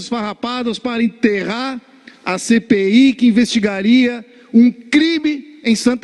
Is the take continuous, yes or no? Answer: yes